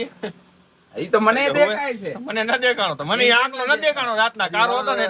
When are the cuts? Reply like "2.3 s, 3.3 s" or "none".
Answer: none